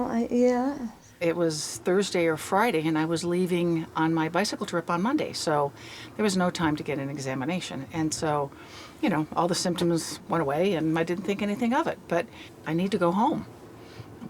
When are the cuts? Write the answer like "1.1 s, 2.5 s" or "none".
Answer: 1.2 s, 12.3 s